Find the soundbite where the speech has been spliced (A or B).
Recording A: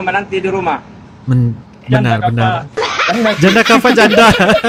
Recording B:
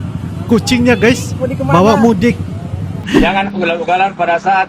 B